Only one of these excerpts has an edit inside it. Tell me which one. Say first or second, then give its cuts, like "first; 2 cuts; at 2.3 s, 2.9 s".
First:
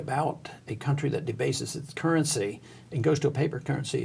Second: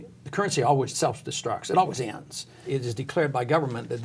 second; 2 cuts; at 0.9 s, 2.6 s